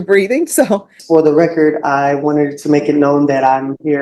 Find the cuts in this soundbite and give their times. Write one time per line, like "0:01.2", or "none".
0:00.9